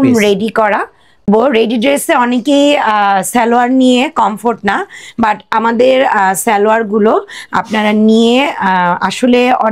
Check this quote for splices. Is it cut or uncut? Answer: cut